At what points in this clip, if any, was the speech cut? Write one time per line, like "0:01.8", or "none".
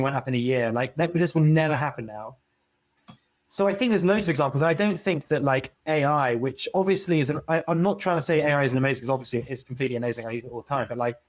0:02.7